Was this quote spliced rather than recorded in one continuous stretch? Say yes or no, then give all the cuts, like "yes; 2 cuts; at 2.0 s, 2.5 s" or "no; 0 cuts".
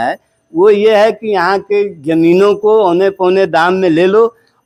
no; 0 cuts